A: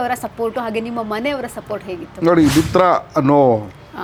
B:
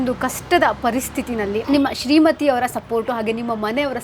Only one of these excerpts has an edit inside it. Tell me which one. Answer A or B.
B